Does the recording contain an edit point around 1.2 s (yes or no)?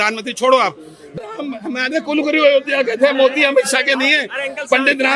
yes